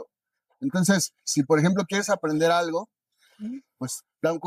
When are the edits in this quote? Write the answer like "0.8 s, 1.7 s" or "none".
none